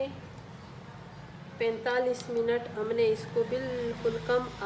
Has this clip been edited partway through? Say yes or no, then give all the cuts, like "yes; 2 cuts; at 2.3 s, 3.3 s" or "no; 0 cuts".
no; 0 cuts